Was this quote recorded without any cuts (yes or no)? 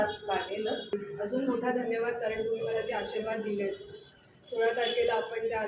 no